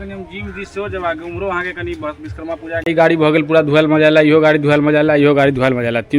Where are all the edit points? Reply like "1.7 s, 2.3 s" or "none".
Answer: 2.9 s